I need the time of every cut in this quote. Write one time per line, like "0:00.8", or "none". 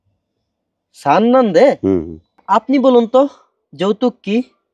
0:02.4